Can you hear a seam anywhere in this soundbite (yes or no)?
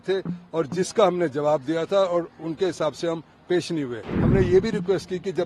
yes